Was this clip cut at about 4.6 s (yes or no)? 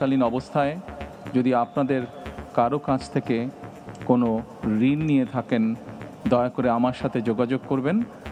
no